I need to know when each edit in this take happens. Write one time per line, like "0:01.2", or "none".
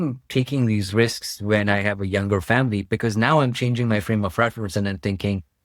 none